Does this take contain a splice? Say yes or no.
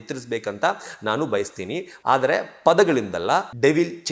no